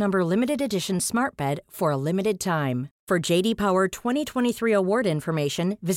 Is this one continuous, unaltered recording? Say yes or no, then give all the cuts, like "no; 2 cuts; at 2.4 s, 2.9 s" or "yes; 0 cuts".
yes; 0 cuts